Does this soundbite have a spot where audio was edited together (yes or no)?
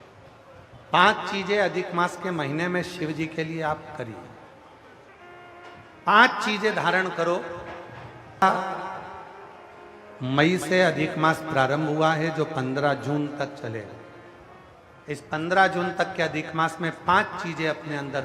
yes